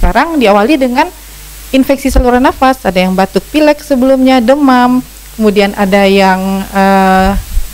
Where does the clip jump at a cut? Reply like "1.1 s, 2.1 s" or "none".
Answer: none